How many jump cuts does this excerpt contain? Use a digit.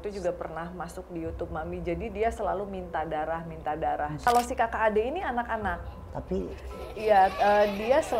1